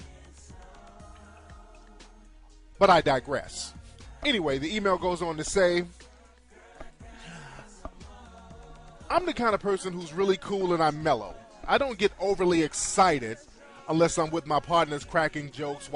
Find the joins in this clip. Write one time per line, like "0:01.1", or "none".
0:07.7